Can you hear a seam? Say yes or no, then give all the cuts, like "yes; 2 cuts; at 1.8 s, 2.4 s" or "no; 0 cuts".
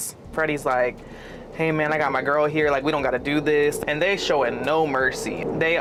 no; 0 cuts